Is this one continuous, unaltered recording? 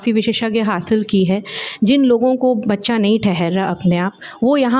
yes; 0 cuts

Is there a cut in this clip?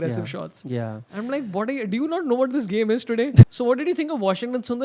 yes; 1 cut; at 3.5 s

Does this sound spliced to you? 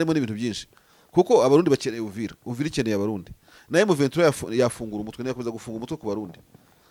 no; 0 cuts

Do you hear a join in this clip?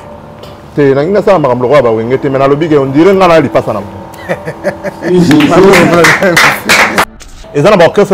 yes; 1 cut; at 7.0 s

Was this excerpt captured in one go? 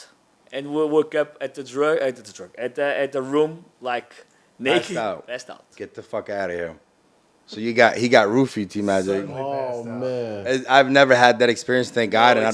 yes; 0 cuts

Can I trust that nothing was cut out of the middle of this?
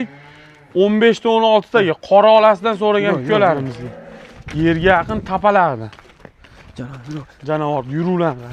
yes; 0 cuts

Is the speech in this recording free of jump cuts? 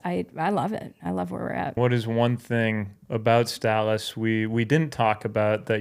no; 1 cut; at 1.8 s

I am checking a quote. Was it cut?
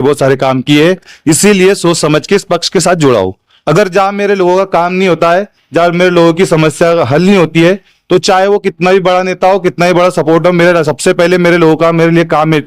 yes; 1 cut; at 3.5 s

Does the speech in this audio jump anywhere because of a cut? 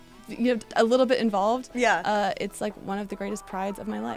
no; 0 cuts

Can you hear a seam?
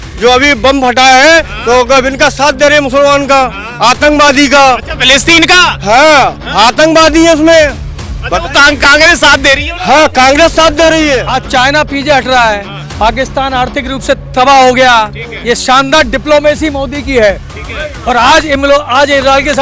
yes; 1 cut; at 11.3 s

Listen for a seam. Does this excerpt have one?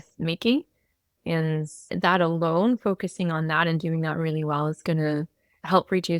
no; 0 cuts

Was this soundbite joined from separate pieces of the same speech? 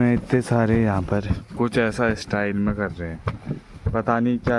yes; 1 cut; at 1.4 s

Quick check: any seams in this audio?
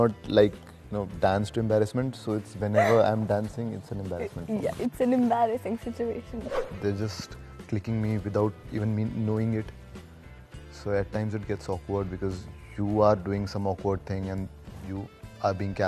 yes; 1 cut; at 6.7 s

